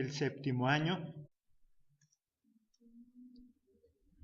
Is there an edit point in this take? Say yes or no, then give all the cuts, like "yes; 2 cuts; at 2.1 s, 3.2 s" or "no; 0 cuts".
no; 0 cuts